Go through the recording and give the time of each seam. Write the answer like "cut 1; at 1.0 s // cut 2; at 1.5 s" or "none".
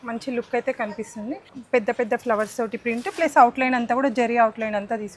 cut 1; at 1.5 s

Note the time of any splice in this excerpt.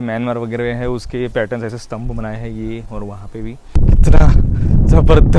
cut 1; at 3.7 s

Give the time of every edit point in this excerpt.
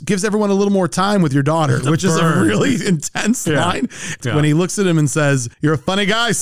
cut 1; at 4.2 s

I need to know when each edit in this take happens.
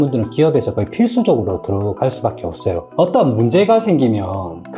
cut 1; at 2.8 s

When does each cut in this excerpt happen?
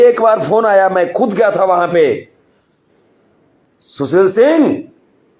cut 1; at 3.7 s

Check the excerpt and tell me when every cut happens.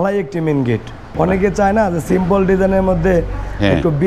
cut 1; at 1.1 s

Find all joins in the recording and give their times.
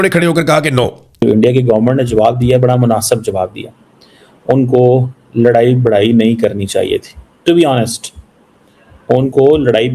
cut 1; at 1.2 s

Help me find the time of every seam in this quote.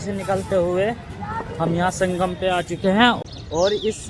cut 1; at 3.2 s

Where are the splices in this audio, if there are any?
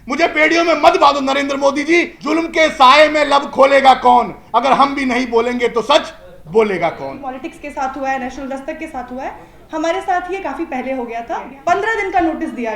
cut 1; at 2.2 s // cut 2; at 7.3 s // cut 3; at 11.5 s

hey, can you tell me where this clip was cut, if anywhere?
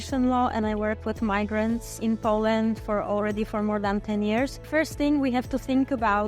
cut 1; at 1.9 s // cut 2; at 4.7 s

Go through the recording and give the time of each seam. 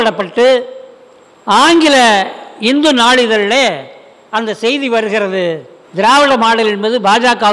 cut 1; at 5.8 s

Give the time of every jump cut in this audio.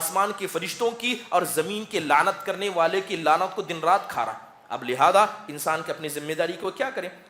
none

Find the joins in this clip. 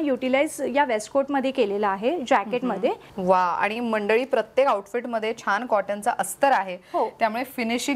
cut 1; at 3.1 s

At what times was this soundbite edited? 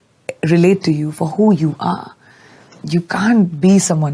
none

